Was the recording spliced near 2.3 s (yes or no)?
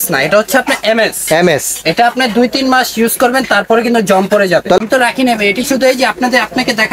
no